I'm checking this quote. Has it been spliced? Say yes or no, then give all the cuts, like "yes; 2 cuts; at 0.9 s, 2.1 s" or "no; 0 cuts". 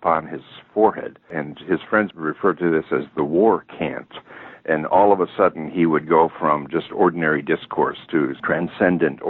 yes; 1 cut; at 2.1 s